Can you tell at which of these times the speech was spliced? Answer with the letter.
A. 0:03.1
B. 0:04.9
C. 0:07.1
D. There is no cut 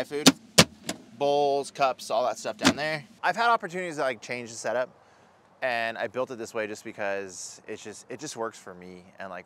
A